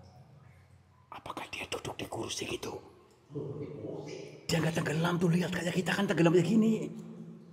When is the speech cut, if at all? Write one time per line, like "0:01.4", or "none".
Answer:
none